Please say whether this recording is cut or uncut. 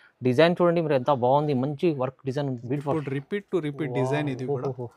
cut